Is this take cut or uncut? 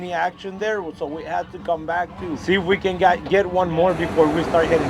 cut